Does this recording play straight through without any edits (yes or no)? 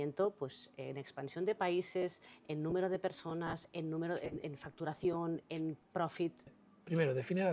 no